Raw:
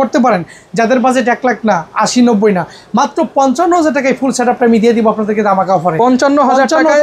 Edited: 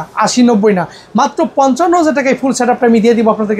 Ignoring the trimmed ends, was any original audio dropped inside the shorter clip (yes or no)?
no